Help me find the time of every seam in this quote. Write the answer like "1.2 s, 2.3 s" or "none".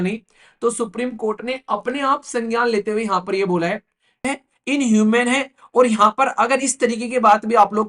4.2 s